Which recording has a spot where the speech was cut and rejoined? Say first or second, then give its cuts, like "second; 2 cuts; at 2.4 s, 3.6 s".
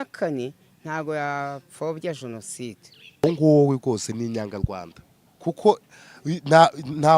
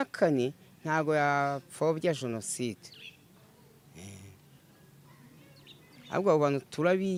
first; 1 cut; at 3.2 s